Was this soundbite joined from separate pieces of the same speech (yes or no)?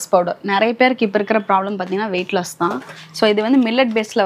no